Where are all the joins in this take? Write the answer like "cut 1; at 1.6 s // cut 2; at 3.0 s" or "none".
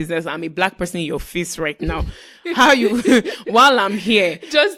none